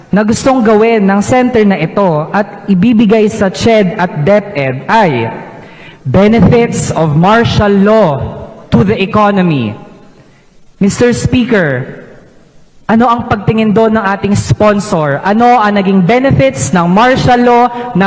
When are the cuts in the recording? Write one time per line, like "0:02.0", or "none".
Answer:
none